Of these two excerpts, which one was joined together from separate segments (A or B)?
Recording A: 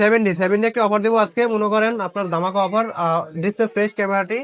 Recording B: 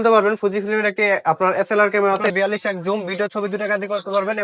B